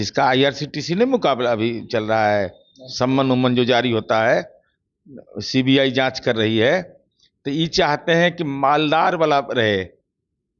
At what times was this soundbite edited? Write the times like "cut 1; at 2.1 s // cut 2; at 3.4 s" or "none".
none